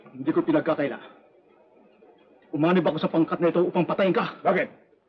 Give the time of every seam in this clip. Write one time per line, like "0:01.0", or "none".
none